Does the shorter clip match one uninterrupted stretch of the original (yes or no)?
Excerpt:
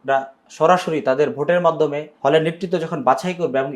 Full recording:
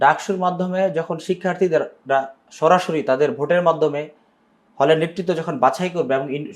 no